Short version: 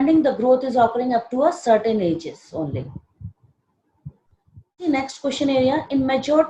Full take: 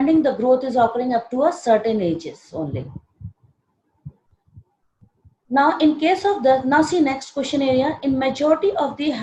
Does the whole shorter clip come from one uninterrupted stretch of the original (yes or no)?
no